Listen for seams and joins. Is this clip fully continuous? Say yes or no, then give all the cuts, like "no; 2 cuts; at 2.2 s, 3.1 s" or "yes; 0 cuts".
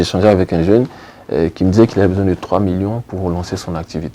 yes; 0 cuts